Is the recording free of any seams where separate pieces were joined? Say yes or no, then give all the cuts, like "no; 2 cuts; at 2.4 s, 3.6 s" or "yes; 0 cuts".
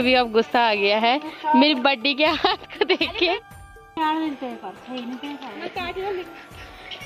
yes; 0 cuts